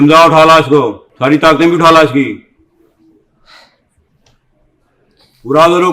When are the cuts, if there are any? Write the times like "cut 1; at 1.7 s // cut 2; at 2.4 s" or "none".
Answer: cut 1; at 1.0 s